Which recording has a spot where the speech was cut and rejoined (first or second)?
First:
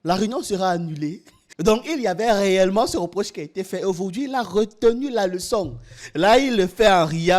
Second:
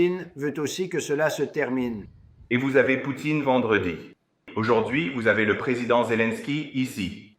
first